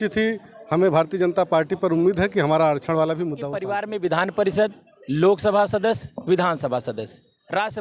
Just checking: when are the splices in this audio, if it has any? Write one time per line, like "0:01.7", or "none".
0:03.8